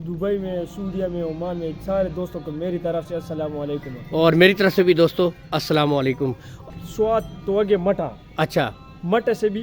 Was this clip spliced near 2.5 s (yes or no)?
no